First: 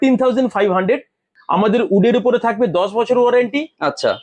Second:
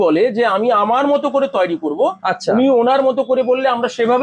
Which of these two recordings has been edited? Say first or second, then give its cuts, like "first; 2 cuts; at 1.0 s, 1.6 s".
first; 1 cut; at 1.3 s